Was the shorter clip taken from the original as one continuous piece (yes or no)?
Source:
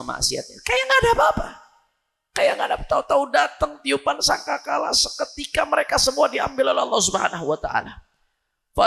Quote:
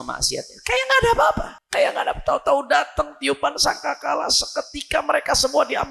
no